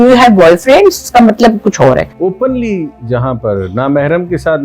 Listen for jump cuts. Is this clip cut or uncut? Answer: cut